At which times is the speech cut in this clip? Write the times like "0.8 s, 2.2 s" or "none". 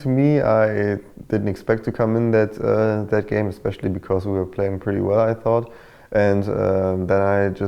none